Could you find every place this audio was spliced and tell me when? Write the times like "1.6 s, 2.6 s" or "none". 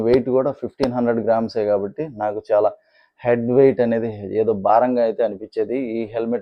none